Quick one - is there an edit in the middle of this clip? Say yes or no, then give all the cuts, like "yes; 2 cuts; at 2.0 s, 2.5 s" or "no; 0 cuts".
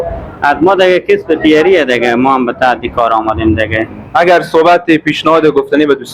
yes; 1 cut; at 4.0 s